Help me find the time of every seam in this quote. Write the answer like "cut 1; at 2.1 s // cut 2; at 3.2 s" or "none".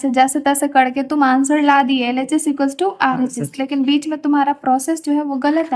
none